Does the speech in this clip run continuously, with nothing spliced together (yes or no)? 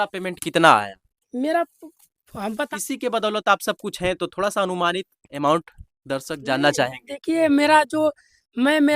no